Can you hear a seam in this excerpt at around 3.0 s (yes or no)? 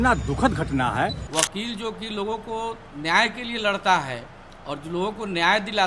no